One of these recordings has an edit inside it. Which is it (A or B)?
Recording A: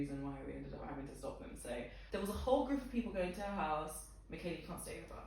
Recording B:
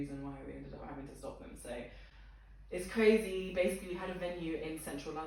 A